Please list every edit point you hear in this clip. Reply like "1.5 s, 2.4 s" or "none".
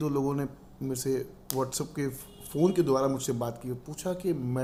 none